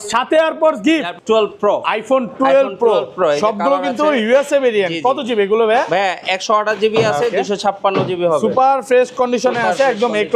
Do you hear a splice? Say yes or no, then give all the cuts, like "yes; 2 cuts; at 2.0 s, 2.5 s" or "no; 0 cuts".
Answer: yes; 1 cut; at 1.1 s